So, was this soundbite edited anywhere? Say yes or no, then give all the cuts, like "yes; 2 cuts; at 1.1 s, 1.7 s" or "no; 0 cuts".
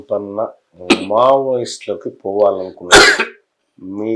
no; 0 cuts